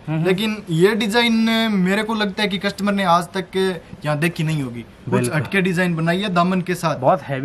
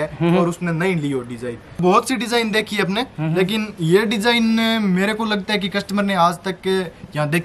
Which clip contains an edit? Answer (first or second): second